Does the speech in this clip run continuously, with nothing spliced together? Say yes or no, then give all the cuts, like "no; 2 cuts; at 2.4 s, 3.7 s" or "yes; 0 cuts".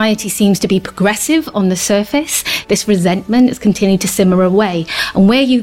no; 1 cut; at 2.6 s